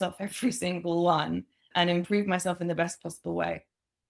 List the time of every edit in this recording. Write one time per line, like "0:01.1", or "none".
0:01.7